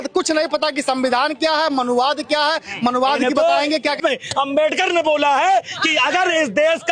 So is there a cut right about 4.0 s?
yes; 1 cut; at 4.0 s

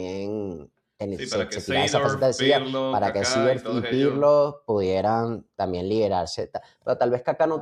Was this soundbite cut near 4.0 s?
no; 0 cuts

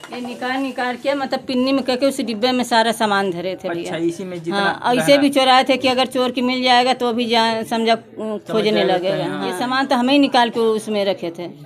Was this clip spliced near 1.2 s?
no; 1 cut; at 10.0 s

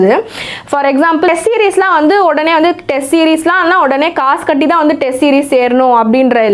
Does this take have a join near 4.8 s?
no; 1 cut; at 1.3 s

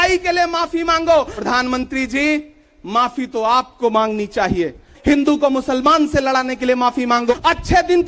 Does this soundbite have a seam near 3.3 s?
no; 3 cuts; at 1.3 s, 4.9 s, 7.3 s

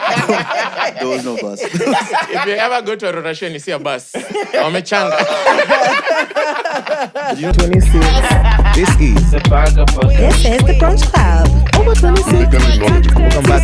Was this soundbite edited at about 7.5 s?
yes; 1 cut; at 7.5 s

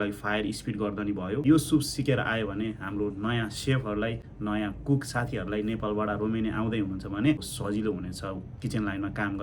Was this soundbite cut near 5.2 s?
no; 2 cuts; at 1.4 s, 7.6 s

